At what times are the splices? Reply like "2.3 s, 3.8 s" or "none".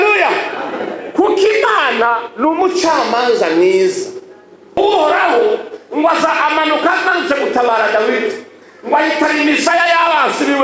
4.8 s